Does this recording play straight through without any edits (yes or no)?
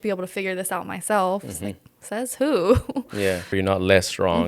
no